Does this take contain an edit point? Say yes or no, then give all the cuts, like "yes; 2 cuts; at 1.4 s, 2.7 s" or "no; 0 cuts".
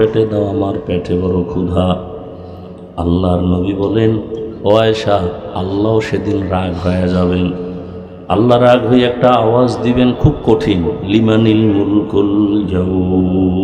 no; 0 cuts